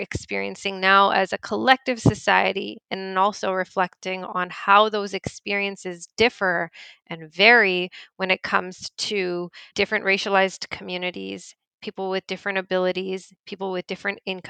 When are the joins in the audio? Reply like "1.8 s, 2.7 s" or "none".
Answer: 9.6 s